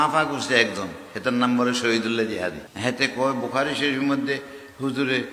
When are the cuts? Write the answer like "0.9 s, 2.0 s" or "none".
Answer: 2.7 s